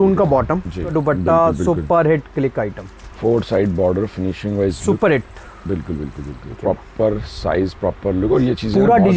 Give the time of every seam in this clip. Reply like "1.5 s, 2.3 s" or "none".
0.9 s, 6.6 s